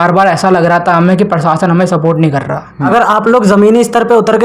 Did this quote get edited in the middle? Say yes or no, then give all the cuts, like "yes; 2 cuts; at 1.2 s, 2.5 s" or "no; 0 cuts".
yes; 1 cut; at 2.9 s